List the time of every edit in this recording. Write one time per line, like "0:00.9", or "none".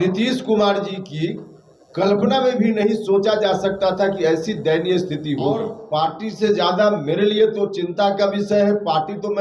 0:05.8
0:08.6